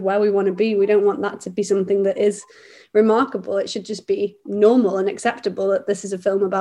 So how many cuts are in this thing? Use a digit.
0